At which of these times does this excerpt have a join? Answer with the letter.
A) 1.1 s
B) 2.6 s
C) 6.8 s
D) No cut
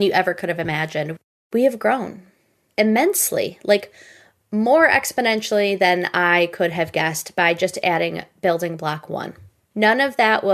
A